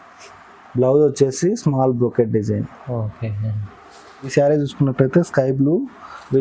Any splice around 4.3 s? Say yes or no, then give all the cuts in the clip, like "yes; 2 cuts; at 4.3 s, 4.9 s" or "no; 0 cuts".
yes; 1 cut; at 4.3 s